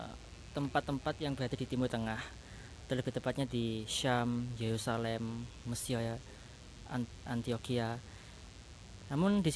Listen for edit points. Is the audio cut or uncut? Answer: uncut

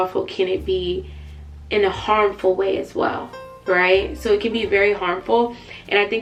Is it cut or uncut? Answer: uncut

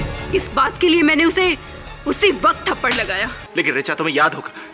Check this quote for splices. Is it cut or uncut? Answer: cut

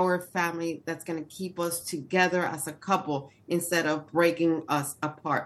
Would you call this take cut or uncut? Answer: uncut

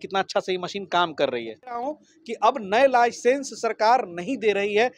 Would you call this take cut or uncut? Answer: cut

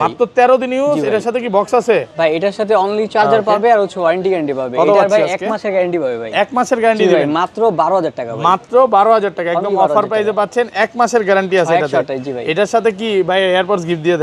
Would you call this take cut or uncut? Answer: uncut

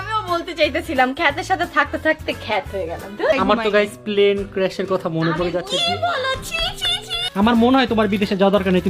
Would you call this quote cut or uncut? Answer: cut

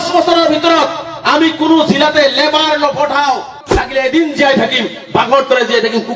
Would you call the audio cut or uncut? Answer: cut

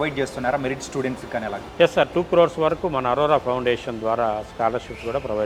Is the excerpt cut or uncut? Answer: uncut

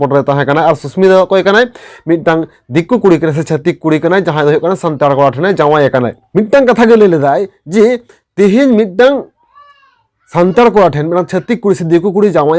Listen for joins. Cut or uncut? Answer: cut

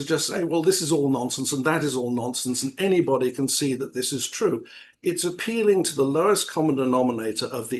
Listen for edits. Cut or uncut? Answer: uncut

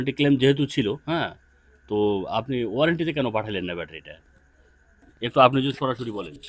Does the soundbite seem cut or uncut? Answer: uncut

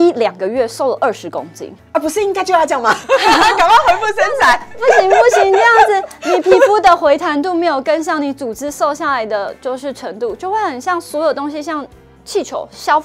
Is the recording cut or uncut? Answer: uncut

